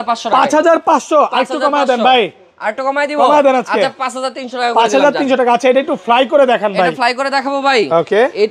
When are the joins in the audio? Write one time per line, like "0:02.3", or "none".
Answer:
none